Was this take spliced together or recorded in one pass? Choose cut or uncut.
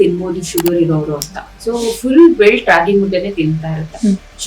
uncut